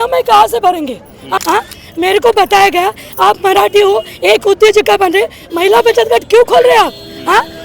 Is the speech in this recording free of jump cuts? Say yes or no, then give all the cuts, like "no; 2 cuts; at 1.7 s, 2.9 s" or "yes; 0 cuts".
no; 1 cut; at 1.4 s